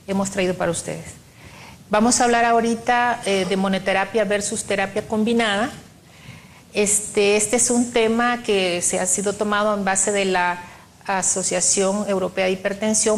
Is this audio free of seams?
no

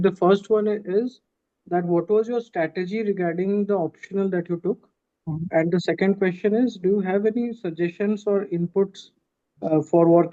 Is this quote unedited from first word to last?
yes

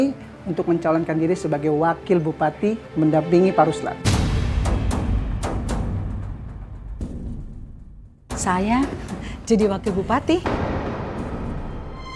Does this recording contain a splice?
no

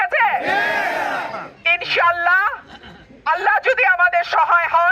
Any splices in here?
yes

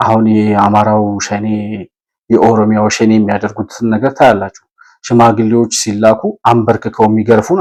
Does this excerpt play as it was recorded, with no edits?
yes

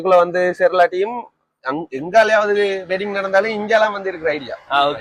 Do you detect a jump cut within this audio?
no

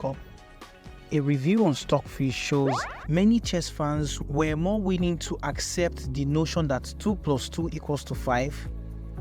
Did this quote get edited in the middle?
yes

